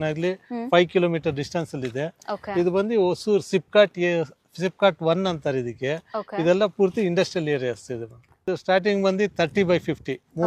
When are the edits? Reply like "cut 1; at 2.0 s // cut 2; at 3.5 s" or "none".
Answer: cut 1; at 8.4 s